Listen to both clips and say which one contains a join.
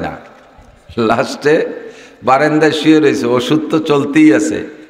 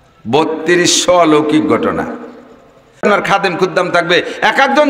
second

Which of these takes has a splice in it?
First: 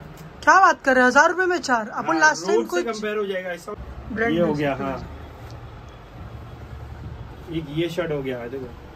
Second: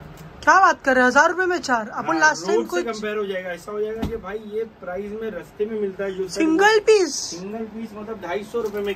first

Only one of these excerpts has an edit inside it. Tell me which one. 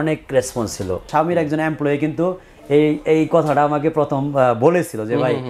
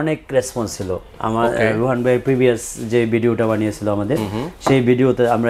first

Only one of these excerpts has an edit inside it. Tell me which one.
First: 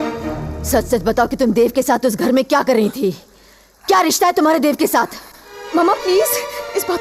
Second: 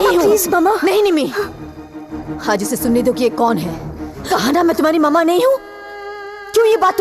second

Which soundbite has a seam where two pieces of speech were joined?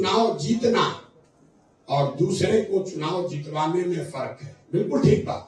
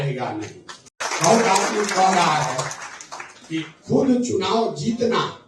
second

